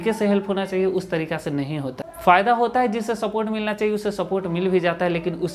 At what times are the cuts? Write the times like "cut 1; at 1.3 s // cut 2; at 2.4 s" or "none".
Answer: cut 1; at 2.1 s